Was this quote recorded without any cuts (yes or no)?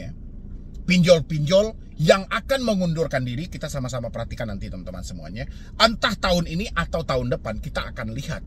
yes